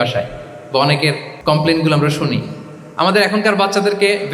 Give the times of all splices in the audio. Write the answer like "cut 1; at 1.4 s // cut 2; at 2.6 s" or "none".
cut 1; at 1.3 s